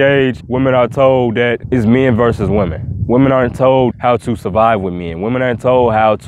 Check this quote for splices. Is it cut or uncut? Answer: uncut